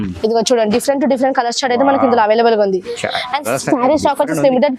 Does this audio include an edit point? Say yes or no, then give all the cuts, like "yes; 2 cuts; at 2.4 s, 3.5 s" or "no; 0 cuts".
no; 0 cuts